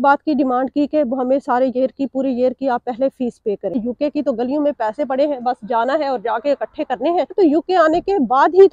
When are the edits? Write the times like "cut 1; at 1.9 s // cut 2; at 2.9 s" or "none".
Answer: cut 1; at 3.8 s // cut 2; at 7.3 s